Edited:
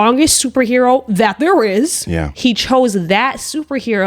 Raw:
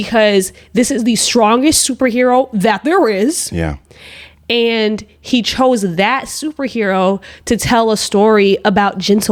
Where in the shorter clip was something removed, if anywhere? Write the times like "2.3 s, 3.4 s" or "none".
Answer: 2.3 s